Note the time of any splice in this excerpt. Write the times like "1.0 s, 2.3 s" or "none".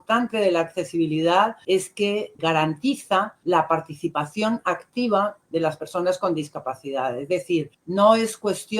1.8 s, 3.3 s, 7.8 s